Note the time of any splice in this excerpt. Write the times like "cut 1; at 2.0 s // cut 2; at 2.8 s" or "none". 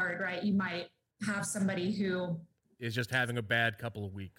none